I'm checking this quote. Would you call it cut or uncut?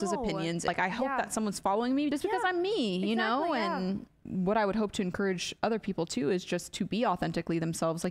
cut